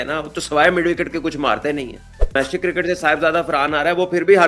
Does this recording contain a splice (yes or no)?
yes